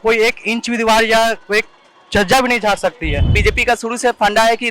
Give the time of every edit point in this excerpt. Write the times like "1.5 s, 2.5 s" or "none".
3.3 s